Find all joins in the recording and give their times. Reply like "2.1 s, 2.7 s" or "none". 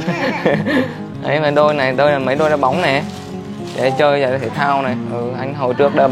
none